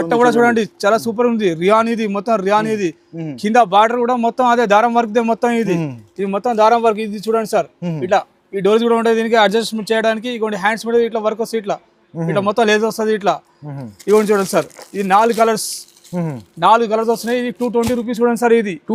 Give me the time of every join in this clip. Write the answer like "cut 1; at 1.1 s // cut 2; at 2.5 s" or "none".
none